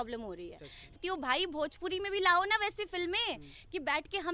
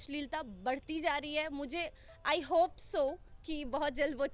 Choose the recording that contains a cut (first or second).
first